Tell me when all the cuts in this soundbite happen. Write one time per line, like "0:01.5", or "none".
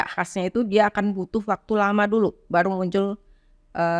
none

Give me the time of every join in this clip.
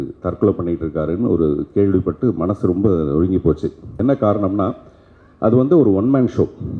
0:03.8

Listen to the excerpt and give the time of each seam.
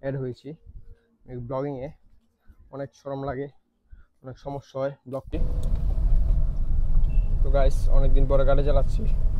0:05.3

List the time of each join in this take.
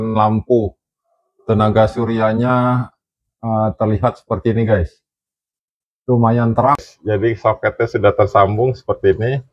0:06.8

